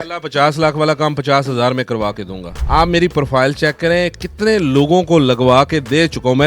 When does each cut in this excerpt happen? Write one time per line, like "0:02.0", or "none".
none